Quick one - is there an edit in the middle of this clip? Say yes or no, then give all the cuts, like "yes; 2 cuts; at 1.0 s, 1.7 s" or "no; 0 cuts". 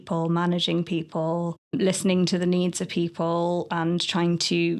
yes; 1 cut; at 1.7 s